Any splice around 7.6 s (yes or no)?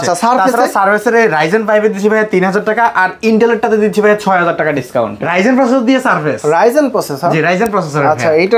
no